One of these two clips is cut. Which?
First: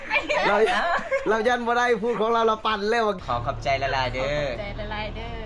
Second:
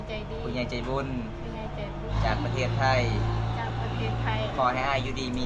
first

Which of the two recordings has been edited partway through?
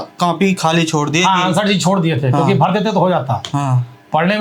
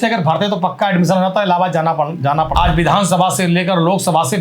second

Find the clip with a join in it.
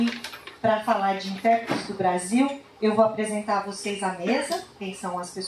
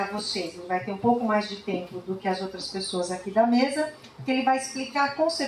second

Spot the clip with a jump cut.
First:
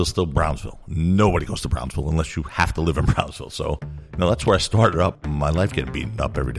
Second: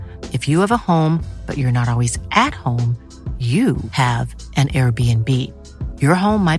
first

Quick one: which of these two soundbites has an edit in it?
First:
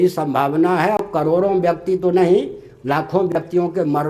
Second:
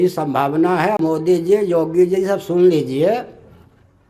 second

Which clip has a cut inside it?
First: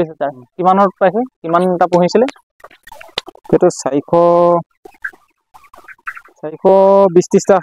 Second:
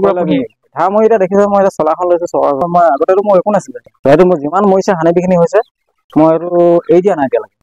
second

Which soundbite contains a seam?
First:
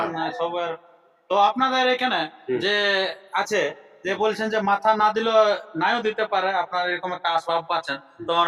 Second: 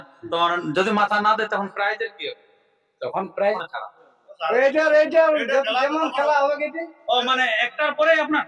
second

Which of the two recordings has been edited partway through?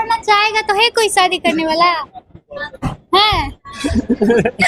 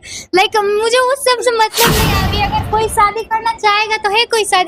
second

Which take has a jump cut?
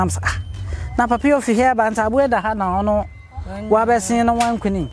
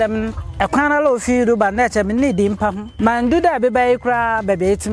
second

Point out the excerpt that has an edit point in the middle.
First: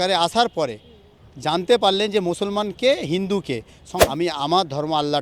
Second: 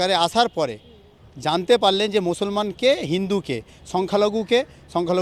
first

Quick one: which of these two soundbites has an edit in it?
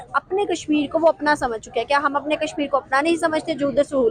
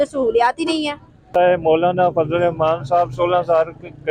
second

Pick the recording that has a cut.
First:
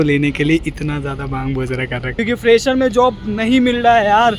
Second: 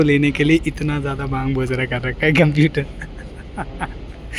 first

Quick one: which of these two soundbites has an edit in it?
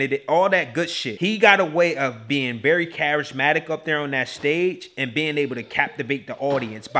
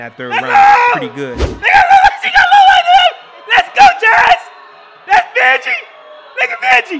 first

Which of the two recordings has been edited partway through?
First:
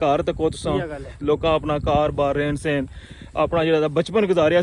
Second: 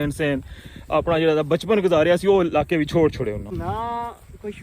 second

